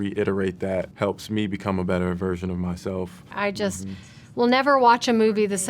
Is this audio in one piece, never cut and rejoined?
no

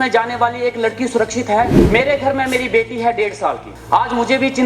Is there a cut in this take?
yes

